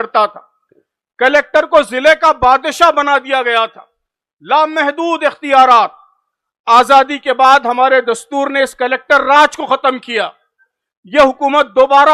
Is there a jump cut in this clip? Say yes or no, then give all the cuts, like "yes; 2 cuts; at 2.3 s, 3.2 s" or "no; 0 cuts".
no; 0 cuts